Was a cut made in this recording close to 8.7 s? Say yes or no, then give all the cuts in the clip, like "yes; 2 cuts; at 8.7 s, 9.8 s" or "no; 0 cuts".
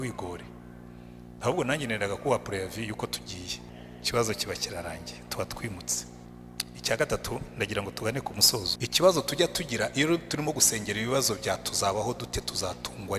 yes; 3 cuts; at 3.7 s, 6.2 s, 8.7 s